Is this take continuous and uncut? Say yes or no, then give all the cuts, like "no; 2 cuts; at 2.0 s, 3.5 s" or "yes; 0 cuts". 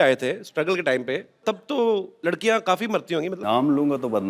no; 3 cuts; at 1.4 s, 2.1 s, 3.4 s